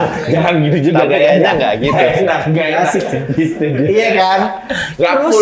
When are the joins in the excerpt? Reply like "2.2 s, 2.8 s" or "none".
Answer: none